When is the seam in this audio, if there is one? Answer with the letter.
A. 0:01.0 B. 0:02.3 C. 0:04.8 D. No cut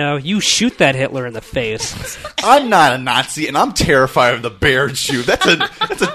B